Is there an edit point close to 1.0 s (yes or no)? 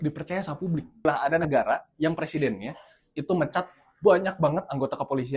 yes